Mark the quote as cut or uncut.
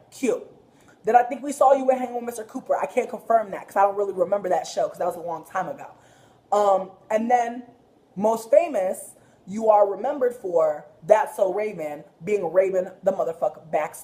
cut